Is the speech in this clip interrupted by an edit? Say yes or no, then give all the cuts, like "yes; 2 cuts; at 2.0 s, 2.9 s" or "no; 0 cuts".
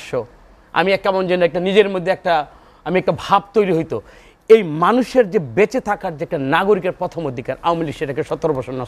no; 0 cuts